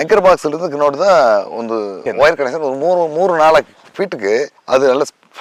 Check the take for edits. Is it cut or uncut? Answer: uncut